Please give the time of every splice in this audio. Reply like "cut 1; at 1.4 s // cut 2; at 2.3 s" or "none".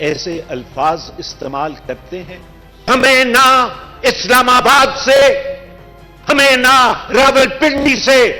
cut 1; at 2.9 s